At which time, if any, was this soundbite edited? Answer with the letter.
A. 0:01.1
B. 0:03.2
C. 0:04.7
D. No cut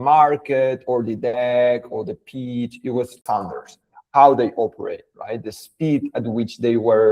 B